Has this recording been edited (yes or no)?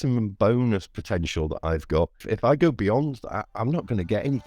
yes